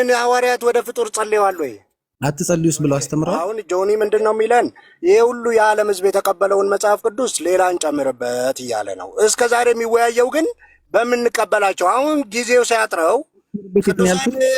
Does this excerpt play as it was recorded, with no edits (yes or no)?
no